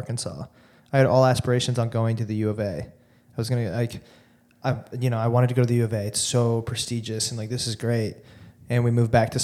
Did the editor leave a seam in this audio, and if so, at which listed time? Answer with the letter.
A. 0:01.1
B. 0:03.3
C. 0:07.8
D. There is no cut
D